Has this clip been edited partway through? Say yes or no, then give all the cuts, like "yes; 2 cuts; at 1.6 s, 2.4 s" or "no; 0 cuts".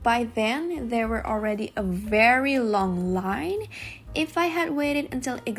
no; 0 cuts